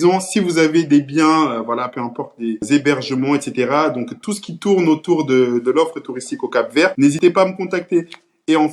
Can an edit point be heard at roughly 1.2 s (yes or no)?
no